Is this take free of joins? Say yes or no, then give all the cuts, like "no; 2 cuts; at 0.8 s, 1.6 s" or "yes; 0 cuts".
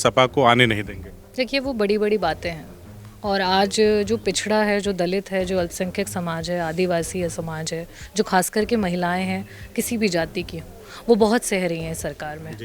yes; 0 cuts